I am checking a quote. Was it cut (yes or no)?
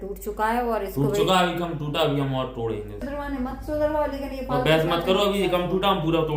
yes